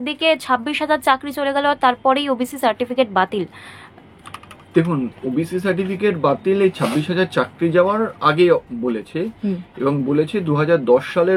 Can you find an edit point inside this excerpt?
no; 0 cuts

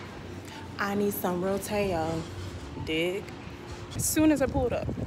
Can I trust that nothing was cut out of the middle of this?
no; 1 cut; at 3.9 s

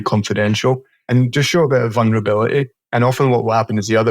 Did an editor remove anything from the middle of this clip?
yes; 1 cut; at 1.1 s

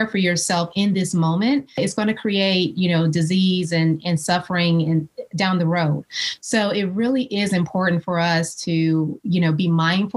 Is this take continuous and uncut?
no; 1 cut; at 1.8 s

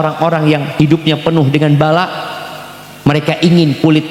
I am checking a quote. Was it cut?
no; 0 cuts

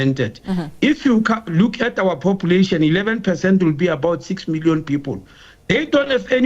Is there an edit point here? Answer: no; 0 cuts

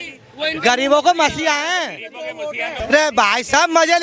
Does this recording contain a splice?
yes; 1 cut; at 2.8 s

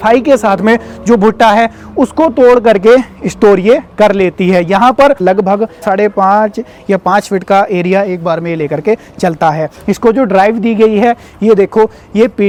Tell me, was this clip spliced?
no; 0 cuts

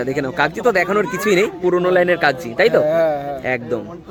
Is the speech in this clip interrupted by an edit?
no; 0 cuts

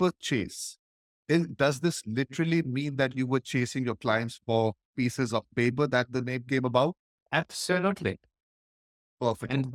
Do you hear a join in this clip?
no; 0 cuts

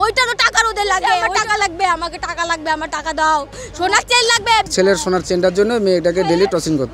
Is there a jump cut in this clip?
yes; 2 cuts; at 1.3 s, 4.7 s

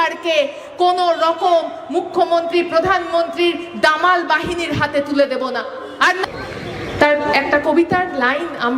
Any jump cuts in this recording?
yes; 1 cut; at 6.2 s

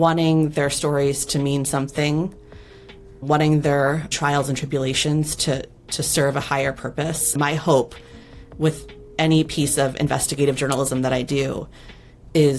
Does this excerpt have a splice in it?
yes; 2 cuts; at 3.2 s, 7.4 s

